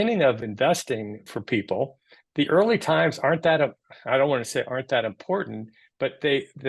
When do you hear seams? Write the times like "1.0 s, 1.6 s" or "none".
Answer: 0.9 s